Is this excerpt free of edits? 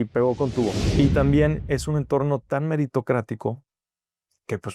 no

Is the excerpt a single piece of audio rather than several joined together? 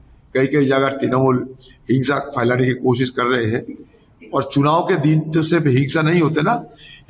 yes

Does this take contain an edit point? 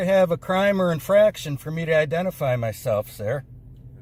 no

